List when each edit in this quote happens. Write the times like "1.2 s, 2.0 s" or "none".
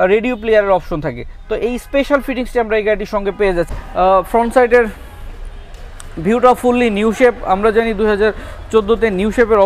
3.7 s